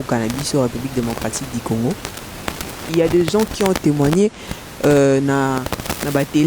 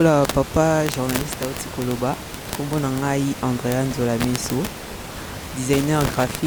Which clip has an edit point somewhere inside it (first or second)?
first